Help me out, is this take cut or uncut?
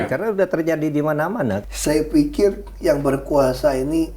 cut